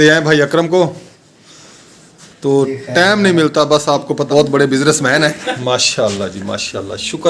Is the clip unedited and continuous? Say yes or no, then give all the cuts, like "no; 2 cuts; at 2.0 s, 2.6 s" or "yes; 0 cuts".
no; 2 cuts; at 4.3 s, 5.5 s